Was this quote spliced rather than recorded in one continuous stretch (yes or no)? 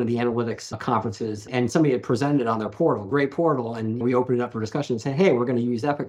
yes